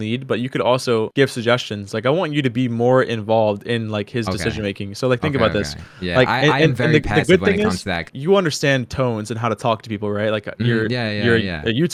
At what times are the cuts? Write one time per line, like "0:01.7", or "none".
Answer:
none